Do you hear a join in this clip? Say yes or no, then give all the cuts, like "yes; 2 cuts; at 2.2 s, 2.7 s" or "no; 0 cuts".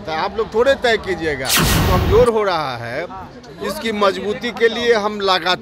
yes; 1 cut; at 1.7 s